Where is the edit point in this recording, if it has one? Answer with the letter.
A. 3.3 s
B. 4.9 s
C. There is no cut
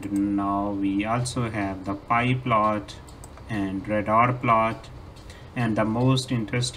C